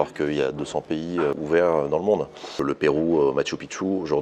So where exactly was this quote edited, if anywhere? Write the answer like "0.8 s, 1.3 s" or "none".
1.4 s, 2.6 s